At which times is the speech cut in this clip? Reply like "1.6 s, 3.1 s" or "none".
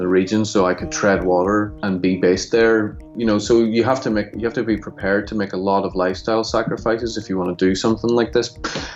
1.8 s, 3.0 s

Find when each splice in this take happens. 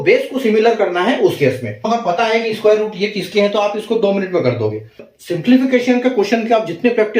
1.9 s, 5.1 s

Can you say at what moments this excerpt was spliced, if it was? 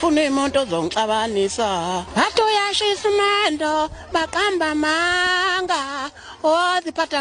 2.1 s

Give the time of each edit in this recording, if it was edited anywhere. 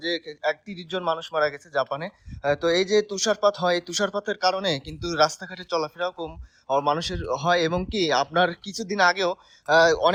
none

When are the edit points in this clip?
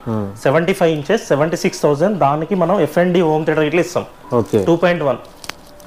none

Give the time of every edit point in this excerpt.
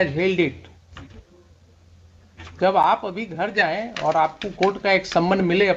none

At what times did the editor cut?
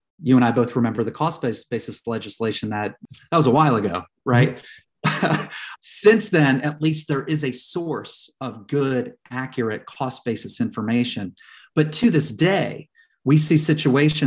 3.0 s, 5.7 s

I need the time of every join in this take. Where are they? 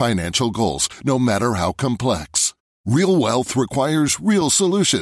none

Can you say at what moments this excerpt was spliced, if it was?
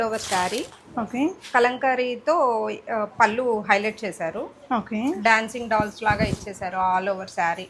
none

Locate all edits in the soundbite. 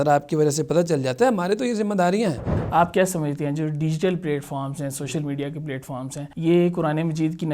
2.5 s, 6.2 s

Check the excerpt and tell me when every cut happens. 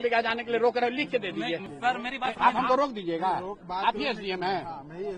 1.7 s

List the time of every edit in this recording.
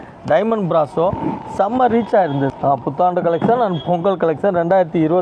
2.5 s

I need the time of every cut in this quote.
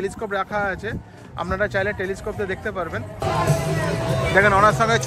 3.1 s

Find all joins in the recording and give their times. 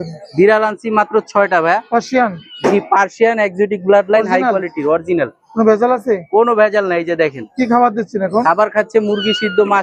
none

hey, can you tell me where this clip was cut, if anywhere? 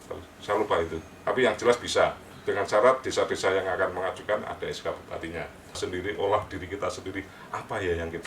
5.8 s

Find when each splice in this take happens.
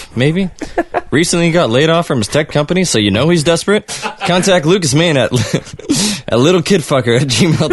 4.3 s

